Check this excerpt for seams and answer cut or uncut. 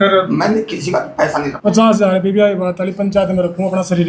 cut